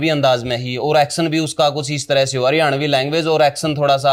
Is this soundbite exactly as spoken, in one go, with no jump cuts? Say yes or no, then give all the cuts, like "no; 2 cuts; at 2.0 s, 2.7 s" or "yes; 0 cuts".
yes; 0 cuts